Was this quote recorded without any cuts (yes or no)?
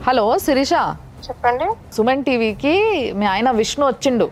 yes